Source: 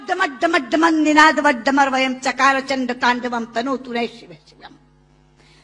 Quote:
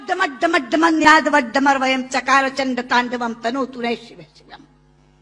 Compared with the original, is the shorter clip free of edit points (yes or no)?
no